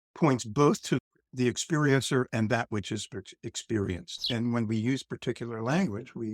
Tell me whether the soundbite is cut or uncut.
cut